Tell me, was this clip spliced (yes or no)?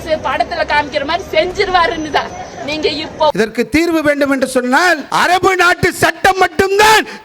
yes